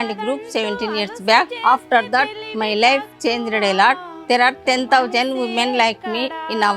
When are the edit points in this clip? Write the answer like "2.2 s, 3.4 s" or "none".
1.5 s